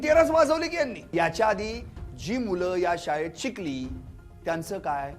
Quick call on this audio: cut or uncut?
cut